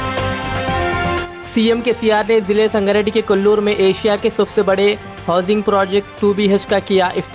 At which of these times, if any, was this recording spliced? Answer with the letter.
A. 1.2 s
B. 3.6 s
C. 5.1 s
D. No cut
A